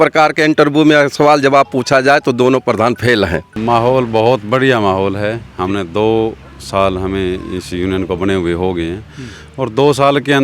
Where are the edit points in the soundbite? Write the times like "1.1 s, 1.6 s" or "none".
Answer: 3.5 s